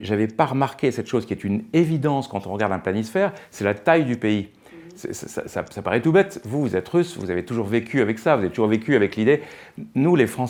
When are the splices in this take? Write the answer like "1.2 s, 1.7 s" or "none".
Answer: none